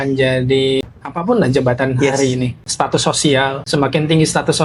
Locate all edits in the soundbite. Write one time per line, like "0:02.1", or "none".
0:00.8
0:02.6
0:03.6